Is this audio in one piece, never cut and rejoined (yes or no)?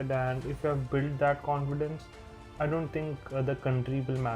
no